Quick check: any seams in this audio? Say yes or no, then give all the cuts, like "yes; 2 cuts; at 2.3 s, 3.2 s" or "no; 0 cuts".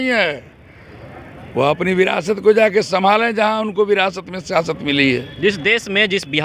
no; 0 cuts